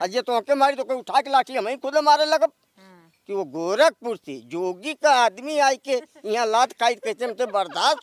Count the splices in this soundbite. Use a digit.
0